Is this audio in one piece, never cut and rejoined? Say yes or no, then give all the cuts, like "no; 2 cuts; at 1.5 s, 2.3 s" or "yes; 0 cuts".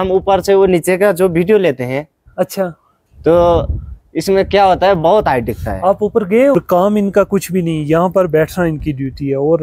no; 1 cut; at 6.5 s